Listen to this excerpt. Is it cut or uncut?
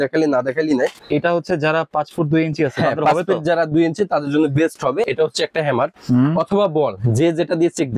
cut